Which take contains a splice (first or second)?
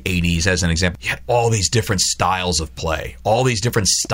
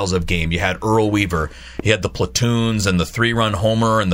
first